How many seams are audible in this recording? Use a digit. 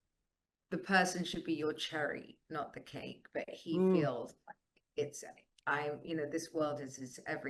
0